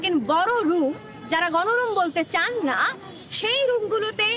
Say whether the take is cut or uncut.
uncut